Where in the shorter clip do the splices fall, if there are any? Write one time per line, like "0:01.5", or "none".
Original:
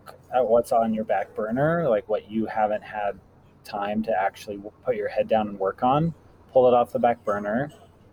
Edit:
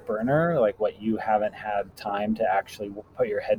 0:02.0